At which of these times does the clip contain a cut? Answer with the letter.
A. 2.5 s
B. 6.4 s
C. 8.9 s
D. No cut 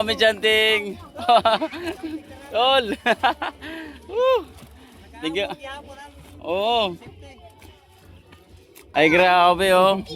C